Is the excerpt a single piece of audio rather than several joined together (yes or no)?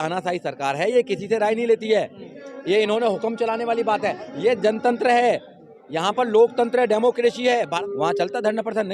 no